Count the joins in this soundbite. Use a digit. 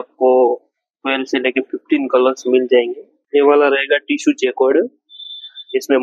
1